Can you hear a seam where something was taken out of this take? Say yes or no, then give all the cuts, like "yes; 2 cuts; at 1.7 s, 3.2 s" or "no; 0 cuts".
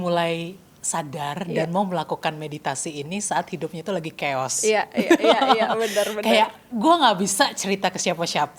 no; 0 cuts